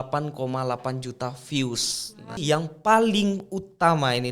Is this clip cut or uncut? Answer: cut